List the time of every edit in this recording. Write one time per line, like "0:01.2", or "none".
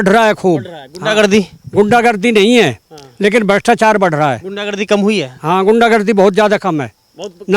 none

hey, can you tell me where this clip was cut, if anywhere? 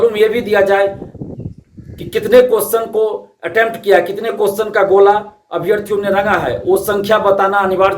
none

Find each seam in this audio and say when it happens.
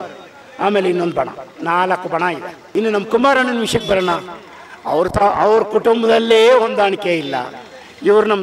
0:02.5

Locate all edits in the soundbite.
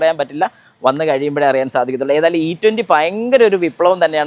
none

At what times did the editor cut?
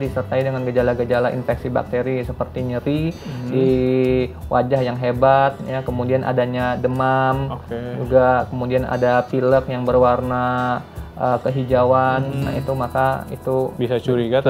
none

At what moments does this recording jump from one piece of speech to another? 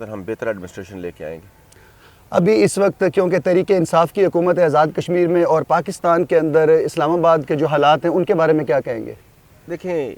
none

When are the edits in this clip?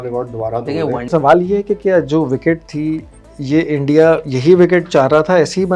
0:01.1

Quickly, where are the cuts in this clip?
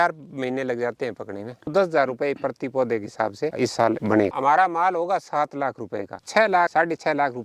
0:01.7
0:04.3
0:06.2

